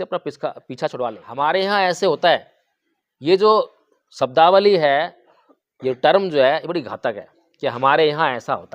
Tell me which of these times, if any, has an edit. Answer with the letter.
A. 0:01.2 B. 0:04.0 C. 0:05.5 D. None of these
A